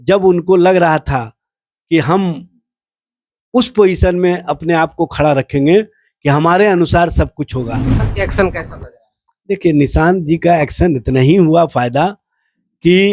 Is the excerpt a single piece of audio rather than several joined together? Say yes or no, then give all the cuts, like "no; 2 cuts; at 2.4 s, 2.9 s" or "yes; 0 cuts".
no; 1 cut; at 8.0 s